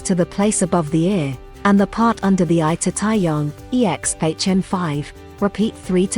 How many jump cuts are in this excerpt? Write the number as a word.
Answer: zero